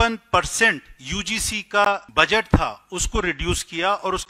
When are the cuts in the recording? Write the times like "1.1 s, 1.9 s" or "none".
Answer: 2.1 s